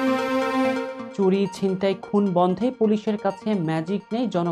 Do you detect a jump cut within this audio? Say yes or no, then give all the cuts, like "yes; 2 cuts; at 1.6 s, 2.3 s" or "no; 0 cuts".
yes; 1 cut; at 1.0 s